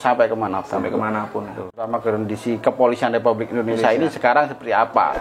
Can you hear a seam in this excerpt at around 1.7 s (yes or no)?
yes